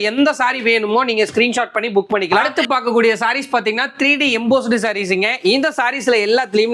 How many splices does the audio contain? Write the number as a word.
one